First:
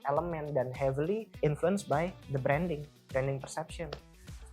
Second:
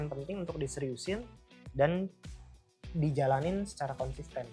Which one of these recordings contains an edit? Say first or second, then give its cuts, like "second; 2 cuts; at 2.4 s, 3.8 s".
first; 2 cuts; at 1.3 s, 2.2 s